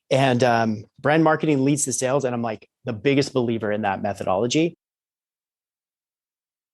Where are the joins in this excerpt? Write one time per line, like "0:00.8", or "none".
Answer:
none